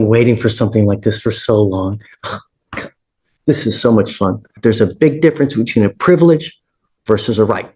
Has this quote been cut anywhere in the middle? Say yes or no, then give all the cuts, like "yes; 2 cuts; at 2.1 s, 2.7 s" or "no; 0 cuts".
yes; 1 cut; at 4.6 s